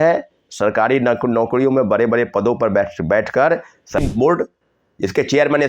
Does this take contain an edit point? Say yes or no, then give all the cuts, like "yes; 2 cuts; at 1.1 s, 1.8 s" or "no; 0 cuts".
yes; 1 cut; at 4.0 s